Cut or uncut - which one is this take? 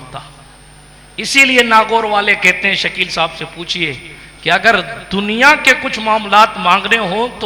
uncut